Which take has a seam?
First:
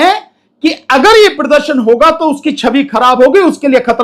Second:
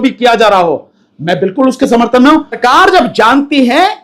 second; 1 cut; at 2.6 s

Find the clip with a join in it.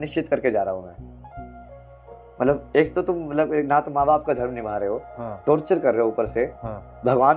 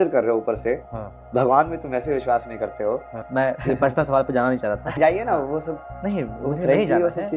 second; 2 cuts; at 3.2 s, 5.0 s

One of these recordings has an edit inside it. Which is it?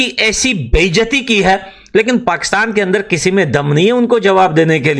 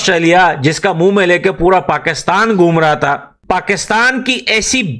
second; 1 cut; at 3.3 s

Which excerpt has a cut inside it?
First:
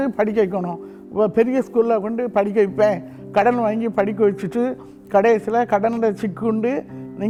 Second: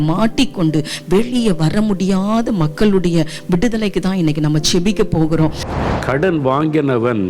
second; 1 cut; at 5.6 s

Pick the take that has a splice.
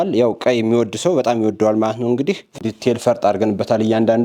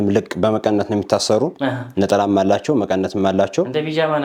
first; 1 cut; at 2.5 s

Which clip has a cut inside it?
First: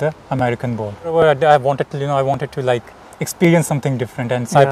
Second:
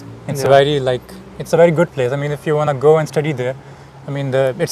first; 1 cut; at 1.1 s

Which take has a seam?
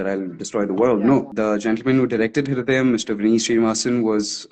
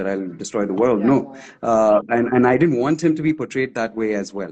first; 1 cut; at 1.3 s

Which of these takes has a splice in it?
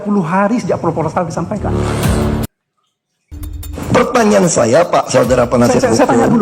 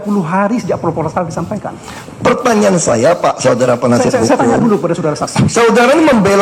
second; 1 cut; at 1.6 s

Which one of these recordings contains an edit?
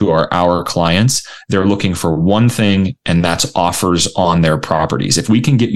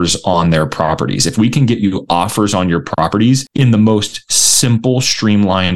second; 1 cut; at 3.5 s

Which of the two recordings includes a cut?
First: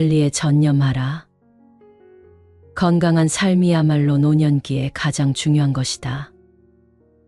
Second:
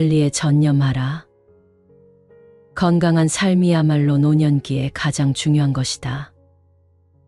first; 3 cuts; at 1.4 s, 2.7 s, 6.4 s

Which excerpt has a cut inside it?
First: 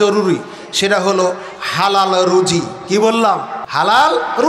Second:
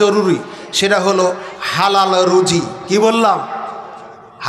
first; 1 cut; at 3.6 s

